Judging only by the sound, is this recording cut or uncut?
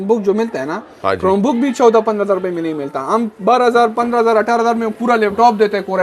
uncut